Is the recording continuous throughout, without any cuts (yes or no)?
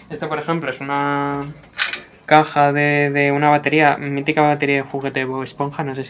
yes